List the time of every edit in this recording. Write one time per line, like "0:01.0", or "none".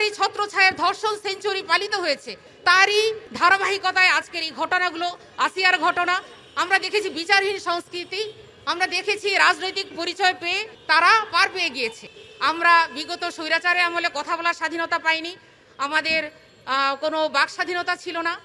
0:12.1